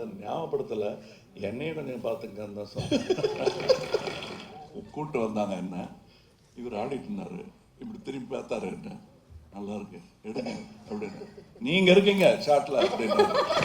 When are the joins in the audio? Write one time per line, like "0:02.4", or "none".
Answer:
0:04.5